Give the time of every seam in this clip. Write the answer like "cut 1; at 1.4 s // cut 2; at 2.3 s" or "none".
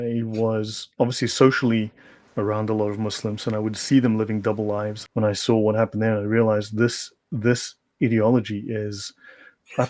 cut 1; at 5.0 s